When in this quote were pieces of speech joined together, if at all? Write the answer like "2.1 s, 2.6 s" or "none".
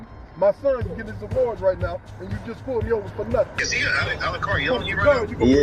3.5 s